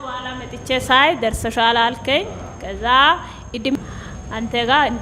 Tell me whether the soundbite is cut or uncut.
cut